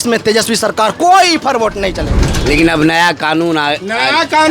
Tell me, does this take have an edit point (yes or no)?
yes